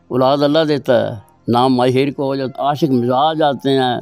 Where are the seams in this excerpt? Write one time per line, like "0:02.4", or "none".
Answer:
0:02.5